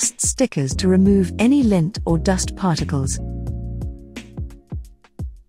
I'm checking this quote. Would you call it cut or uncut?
cut